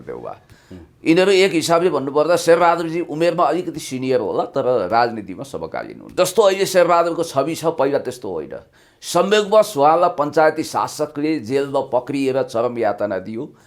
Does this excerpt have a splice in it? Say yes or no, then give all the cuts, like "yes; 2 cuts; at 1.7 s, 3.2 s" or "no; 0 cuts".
yes; 1 cut; at 6.1 s